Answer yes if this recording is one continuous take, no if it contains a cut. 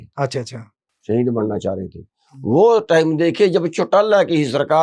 yes